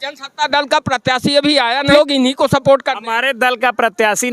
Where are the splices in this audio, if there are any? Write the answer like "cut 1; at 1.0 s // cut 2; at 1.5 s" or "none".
cut 1; at 1.9 s